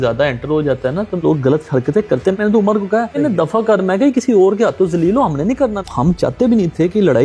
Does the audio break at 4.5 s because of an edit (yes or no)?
no